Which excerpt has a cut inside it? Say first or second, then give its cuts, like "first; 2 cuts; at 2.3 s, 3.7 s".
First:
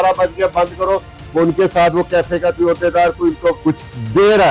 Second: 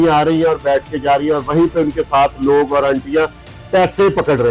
first; 1 cut; at 3.6 s